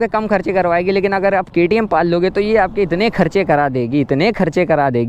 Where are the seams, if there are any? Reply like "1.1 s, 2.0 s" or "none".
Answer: none

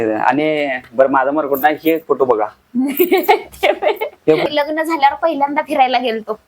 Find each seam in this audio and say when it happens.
4.5 s

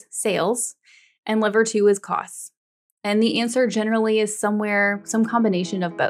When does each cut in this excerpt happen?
none

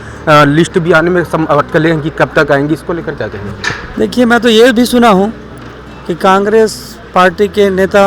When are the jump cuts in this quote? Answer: 3.8 s

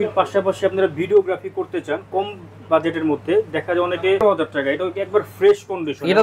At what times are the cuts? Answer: 4.2 s

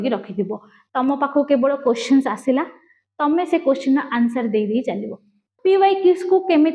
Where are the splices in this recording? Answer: 5.4 s

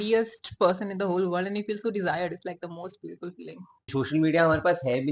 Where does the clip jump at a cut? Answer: 3.8 s

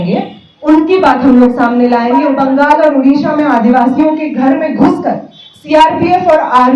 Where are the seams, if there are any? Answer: 2.3 s

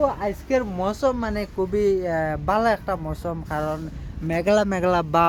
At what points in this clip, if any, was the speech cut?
none

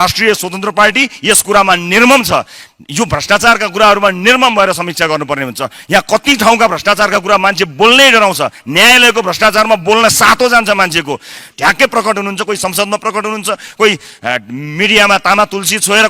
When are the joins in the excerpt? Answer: 11.4 s

